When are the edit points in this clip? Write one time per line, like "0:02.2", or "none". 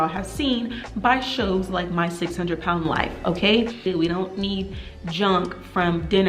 0:03.9